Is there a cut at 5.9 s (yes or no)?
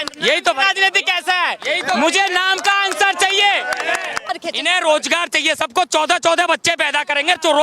no